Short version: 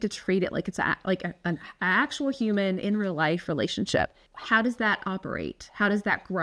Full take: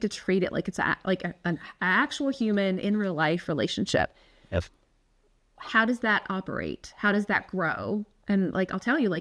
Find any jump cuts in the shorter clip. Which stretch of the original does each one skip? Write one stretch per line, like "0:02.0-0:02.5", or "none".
0:04.3-0:05.5